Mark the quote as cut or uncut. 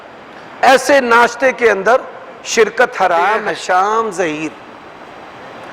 cut